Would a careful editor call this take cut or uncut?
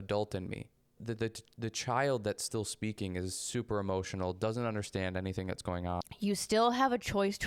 cut